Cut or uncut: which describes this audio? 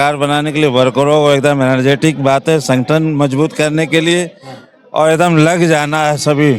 uncut